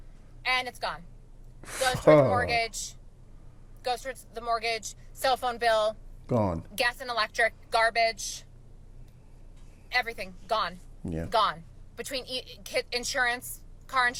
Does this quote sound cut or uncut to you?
uncut